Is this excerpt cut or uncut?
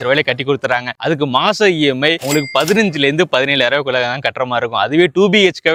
uncut